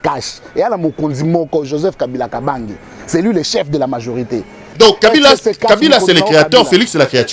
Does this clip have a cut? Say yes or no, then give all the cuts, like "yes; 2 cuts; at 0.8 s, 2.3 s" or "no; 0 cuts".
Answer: yes; 1 cut; at 4.7 s